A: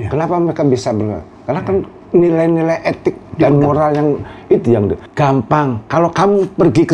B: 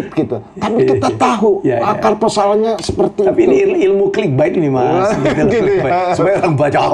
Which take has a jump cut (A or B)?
A